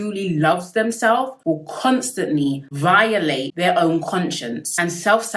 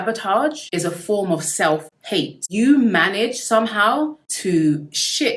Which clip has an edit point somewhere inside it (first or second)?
second